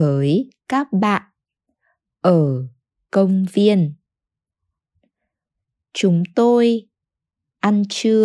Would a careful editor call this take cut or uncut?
cut